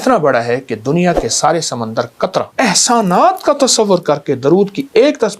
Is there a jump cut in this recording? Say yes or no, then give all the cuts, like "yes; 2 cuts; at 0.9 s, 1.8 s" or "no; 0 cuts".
yes; 1 cut; at 2.5 s